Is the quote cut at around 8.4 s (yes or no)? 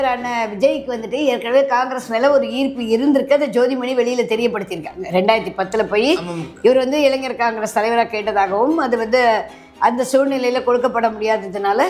no